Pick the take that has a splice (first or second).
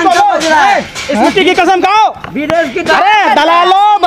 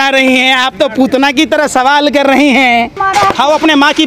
second